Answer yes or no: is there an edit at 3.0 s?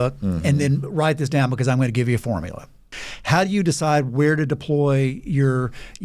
yes